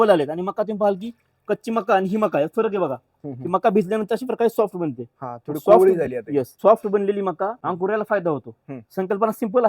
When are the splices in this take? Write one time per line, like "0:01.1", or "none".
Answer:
0:06.5
0:07.6